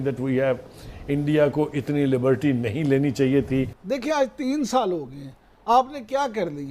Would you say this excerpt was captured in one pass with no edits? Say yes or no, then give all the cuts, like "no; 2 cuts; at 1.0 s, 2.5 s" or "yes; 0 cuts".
no; 1 cut; at 3.8 s